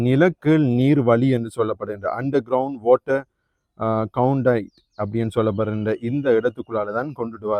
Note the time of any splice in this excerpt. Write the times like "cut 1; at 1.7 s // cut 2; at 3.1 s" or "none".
none